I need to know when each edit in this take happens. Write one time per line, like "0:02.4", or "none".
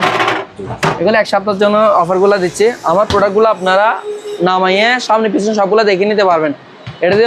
none